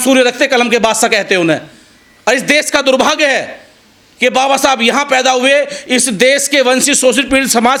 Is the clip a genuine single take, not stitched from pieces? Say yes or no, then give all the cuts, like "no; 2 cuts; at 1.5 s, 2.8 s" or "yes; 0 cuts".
yes; 0 cuts